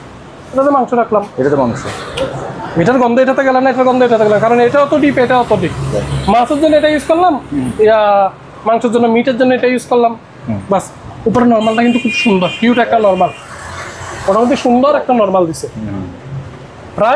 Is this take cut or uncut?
uncut